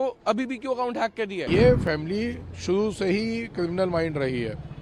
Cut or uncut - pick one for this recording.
cut